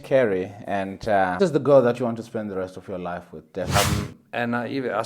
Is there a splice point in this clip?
yes; 2 cuts; at 1.4 s, 3.8 s

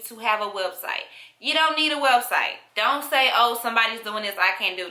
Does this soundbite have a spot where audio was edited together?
yes; 1 cut; at 2.6 s

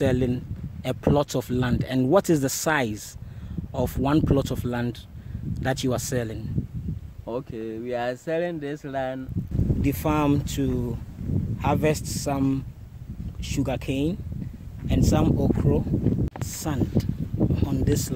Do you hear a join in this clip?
yes; 2 cuts; at 9.5 s, 16.4 s

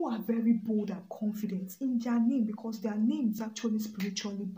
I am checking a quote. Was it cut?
yes; 1 cut; at 3.5 s

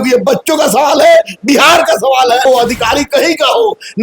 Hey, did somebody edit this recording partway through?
yes; 1 cut; at 2.5 s

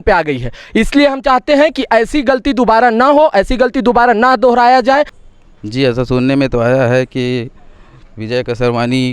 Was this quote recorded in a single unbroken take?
no; 1 cut; at 5.2 s

